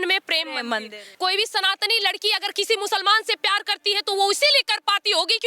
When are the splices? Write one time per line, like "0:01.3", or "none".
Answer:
0:01.0